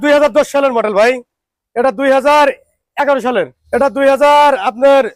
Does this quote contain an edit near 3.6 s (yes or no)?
yes